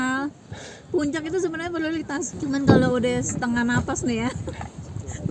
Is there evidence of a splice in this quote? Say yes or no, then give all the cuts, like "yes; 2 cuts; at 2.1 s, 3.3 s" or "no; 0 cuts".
yes; 1 cut; at 2.3 s